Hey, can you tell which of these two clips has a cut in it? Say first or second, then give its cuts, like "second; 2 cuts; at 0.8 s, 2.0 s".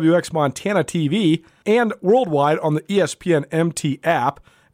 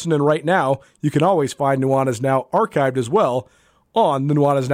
first; 1 cut; at 1.5 s